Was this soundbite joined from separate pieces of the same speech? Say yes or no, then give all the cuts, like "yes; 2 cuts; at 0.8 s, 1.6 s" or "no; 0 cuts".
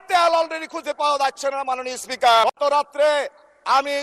yes; 1 cut; at 2.4 s